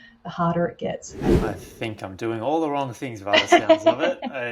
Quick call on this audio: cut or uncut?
cut